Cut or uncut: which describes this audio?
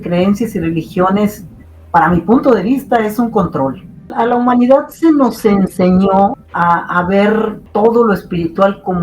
cut